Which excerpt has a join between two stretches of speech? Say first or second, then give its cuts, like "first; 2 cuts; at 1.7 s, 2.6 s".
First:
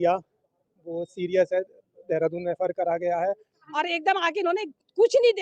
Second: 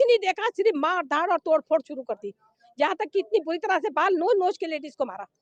first; 1 cut; at 4.0 s